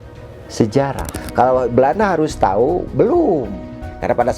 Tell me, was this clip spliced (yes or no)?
yes